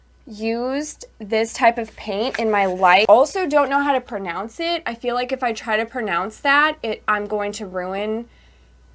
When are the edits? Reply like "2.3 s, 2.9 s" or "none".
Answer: 3.0 s